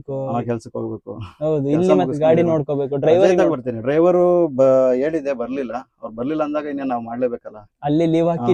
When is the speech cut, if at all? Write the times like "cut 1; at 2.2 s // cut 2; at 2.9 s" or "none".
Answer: none